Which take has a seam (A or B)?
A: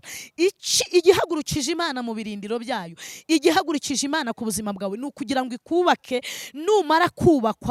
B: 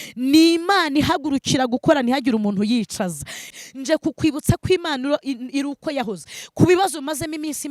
B